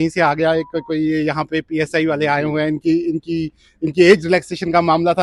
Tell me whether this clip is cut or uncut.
uncut